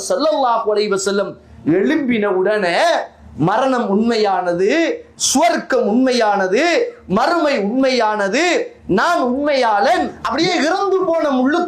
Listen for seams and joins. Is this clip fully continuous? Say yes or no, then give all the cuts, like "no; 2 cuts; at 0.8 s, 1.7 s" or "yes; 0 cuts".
no; 1 cut; at 10.2 s